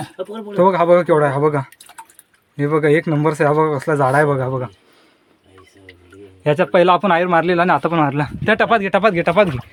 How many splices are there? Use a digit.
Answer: 0